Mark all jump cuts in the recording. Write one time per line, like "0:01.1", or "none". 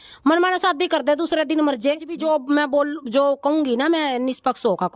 0:02.2

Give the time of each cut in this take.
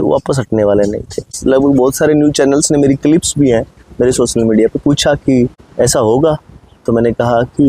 0:01.3
0:05.6

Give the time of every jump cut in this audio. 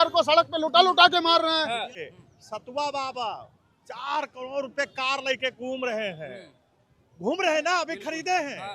0:02.0

